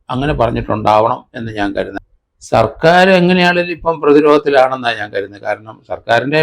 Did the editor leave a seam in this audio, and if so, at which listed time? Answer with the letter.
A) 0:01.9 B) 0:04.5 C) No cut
A